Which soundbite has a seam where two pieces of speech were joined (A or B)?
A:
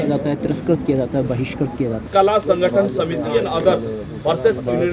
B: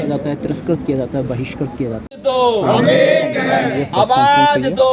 A